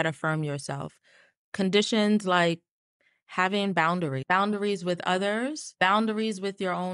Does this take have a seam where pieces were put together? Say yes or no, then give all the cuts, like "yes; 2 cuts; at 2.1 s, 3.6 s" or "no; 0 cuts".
yes; 2 cuts; at 4.2 s, 5.6 s